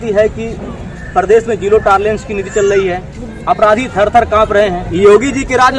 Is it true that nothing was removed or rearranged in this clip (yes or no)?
no